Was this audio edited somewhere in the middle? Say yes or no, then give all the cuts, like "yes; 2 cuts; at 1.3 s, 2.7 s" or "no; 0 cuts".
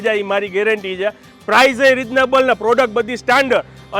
yes; 1 cut; at 1.3 s